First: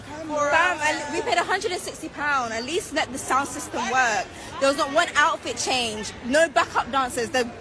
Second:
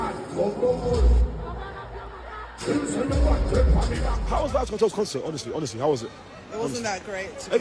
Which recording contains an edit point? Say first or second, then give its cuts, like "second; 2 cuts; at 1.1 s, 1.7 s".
second; 1 cut; at 4.2 s